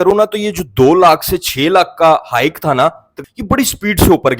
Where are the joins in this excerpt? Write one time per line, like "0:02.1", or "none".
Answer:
0:03.2